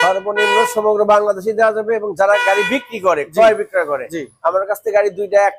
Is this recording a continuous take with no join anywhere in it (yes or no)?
yes